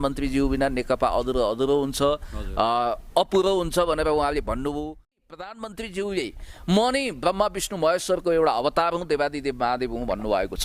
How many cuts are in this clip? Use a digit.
1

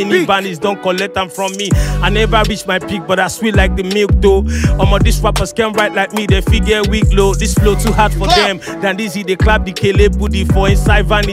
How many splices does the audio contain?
0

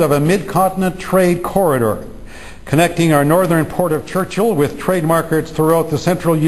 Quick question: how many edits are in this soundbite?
1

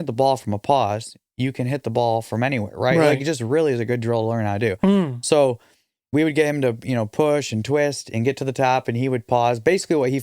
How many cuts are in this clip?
0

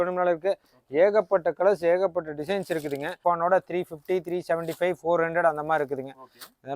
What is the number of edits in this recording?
1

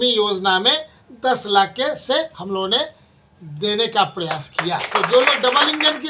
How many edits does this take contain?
1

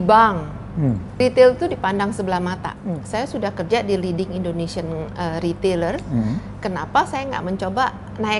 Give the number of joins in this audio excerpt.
2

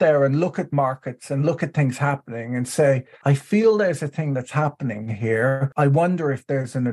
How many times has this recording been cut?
2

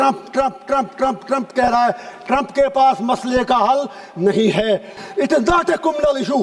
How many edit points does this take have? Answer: 1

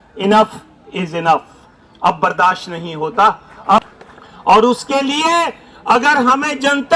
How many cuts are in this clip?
1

